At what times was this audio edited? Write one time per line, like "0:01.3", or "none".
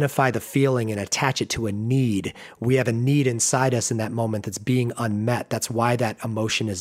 none